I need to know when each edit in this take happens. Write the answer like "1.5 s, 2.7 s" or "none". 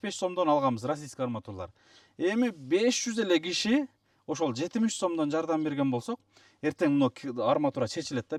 none